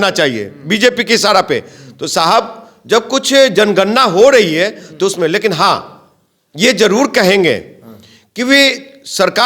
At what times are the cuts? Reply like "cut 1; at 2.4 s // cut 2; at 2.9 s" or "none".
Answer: none